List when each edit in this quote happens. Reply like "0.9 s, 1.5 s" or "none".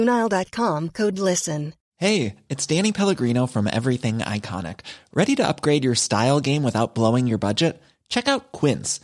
1.8 s